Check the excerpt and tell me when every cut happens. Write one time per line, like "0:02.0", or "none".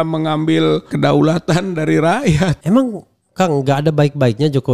0:00.9
0:02.6